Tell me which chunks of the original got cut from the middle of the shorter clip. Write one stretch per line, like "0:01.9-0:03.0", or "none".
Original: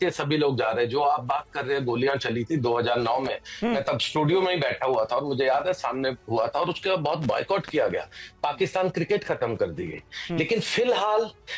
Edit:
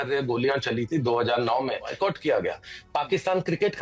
0:03.5-0:07.4